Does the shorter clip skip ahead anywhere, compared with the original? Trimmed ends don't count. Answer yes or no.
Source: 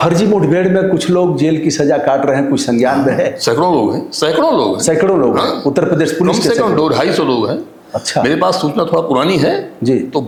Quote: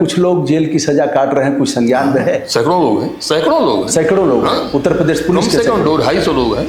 no